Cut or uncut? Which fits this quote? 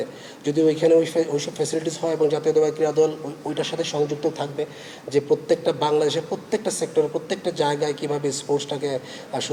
uncut